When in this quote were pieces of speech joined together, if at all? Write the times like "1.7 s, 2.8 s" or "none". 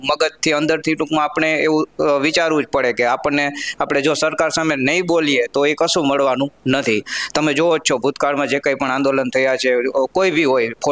none